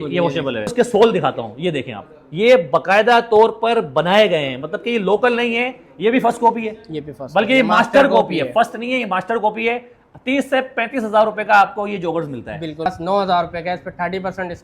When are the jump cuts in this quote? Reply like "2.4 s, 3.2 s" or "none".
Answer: 0.7 s, 12.9 s